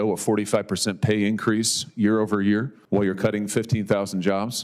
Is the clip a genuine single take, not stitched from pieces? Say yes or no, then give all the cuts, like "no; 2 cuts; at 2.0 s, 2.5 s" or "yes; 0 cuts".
no; 1 cut; at 2.8 s